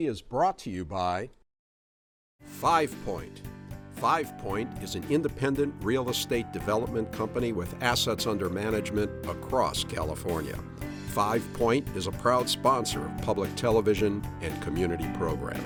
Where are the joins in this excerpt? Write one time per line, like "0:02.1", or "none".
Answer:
none